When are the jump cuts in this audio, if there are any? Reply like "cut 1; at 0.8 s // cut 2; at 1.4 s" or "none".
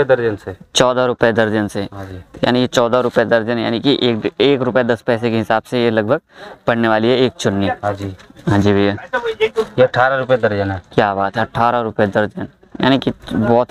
none